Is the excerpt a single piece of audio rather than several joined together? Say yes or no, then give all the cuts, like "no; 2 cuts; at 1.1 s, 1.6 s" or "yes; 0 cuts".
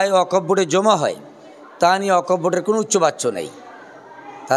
yes; 0 cuts